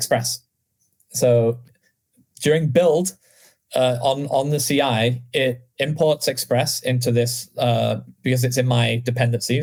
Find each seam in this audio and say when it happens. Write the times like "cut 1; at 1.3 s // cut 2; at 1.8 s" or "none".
none